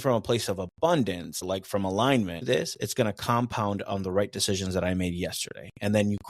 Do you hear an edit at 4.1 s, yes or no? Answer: no